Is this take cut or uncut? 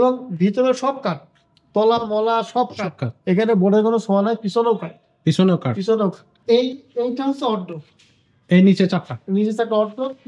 cut